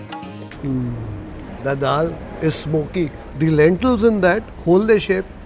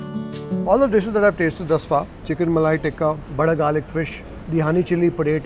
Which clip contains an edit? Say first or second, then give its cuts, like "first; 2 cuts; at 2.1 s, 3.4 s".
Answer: second; 1 cut; at 2.1 s